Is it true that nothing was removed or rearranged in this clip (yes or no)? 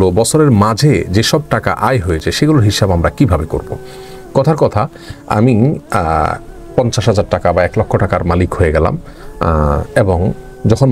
yes